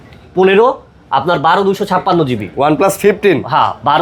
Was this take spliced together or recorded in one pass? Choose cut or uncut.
uncut